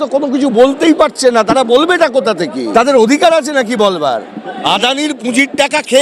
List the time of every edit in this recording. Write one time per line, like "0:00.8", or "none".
0:02.6
0:04.6